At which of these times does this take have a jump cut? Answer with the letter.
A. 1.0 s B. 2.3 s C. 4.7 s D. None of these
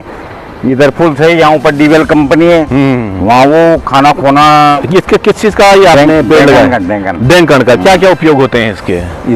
C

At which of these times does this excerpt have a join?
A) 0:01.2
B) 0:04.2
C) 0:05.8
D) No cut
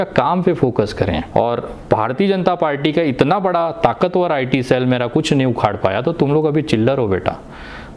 A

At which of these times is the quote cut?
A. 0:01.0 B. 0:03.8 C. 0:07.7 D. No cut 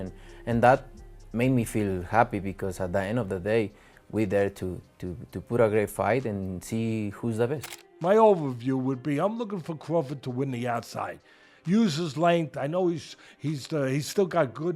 C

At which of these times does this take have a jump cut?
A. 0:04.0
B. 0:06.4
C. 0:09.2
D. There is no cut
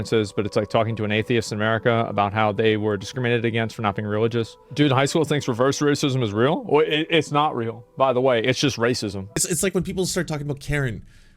C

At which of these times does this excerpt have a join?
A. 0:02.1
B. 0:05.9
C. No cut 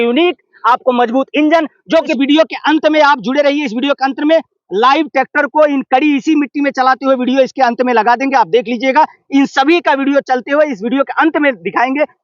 A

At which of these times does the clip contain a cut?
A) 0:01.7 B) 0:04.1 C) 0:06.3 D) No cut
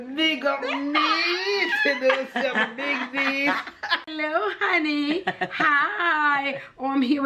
B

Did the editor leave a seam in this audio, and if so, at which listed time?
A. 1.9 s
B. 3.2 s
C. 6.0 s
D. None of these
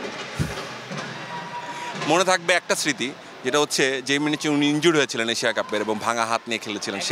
A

